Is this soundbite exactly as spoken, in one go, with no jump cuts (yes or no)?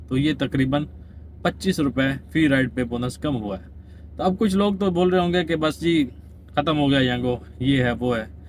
yes